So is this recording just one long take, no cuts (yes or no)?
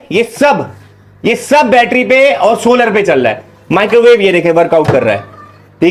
yes